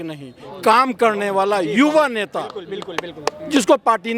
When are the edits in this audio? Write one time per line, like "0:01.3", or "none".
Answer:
none